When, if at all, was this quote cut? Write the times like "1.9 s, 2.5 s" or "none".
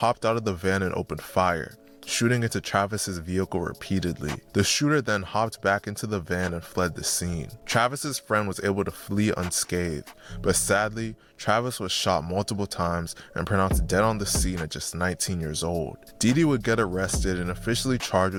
none